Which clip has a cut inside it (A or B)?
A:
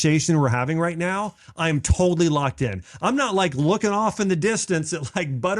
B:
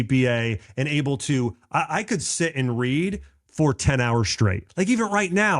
B